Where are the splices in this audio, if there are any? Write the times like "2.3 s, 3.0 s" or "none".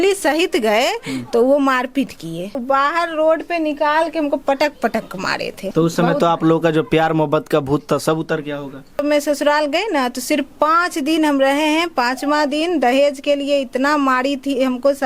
2.6 s, 5.6 s, 9.0 s